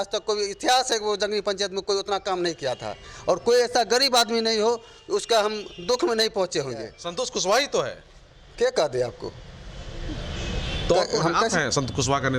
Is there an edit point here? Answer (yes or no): yes